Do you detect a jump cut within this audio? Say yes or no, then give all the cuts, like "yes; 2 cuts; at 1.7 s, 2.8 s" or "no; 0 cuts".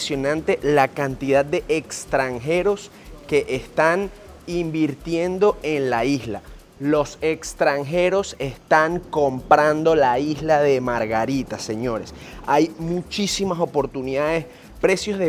no; 0 cuts